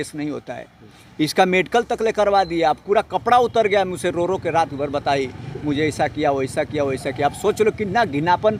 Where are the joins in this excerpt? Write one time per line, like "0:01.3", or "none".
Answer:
none